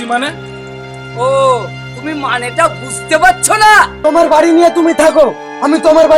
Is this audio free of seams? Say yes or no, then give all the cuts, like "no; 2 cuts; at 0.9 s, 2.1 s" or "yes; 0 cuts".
no; 1 cut; at 4.0 s